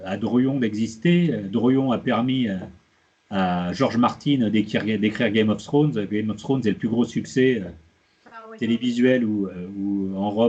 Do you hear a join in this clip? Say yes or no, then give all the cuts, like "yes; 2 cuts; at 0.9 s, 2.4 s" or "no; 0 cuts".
no; 0 cuts